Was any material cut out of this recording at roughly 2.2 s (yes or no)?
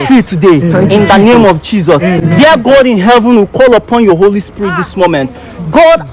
no